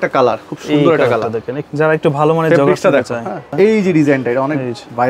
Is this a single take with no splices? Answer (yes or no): no